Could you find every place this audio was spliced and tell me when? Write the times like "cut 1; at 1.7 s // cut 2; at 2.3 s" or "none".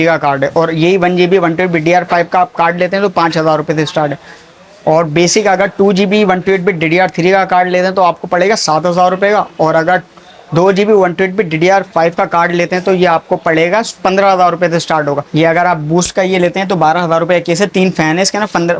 cut 1; at 15.2 s

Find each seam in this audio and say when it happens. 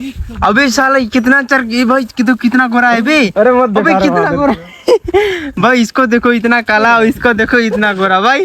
none

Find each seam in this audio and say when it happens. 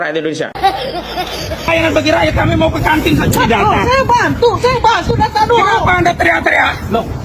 cut 1; at 1.7 s

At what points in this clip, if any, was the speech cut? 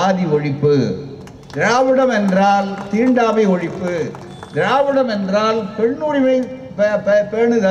none

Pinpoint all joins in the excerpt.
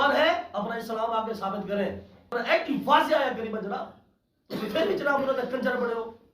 cut 1; at 2.3 s

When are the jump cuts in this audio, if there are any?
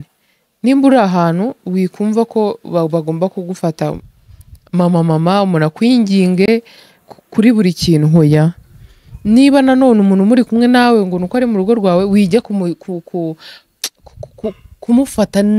none

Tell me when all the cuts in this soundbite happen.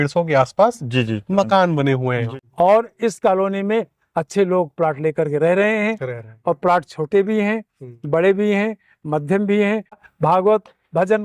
cut 1; at 2.4 s // cut 2; at 10.1 s

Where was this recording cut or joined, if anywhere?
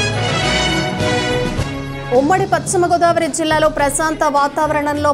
none

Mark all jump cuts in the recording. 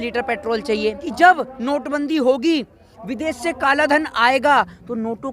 cut 1; at 1.0 s

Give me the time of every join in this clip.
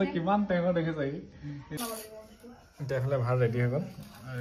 cut 1; at 1.8 s

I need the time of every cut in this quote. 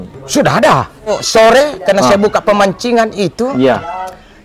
cut 1; at 1.1 s

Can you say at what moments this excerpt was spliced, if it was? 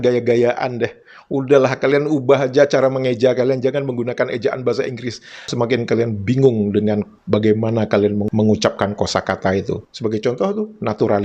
none

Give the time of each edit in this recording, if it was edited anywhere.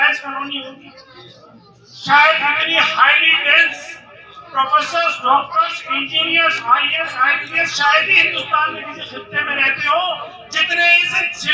none

